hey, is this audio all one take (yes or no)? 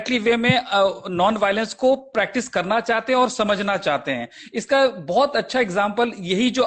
yes